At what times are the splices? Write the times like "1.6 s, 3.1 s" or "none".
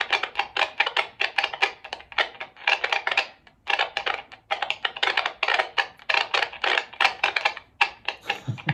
none